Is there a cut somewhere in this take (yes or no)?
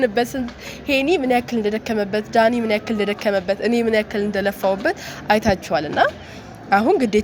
no